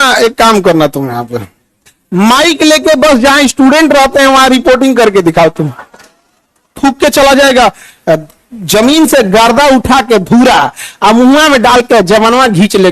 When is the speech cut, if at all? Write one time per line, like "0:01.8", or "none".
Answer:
0:06.7